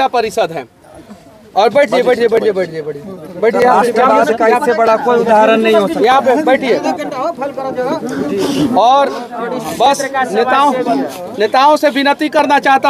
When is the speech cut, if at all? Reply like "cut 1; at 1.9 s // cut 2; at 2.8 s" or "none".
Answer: none